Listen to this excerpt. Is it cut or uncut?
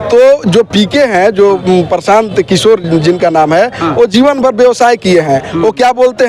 uncut